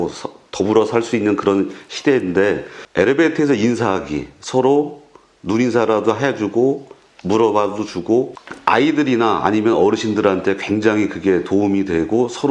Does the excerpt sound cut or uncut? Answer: cut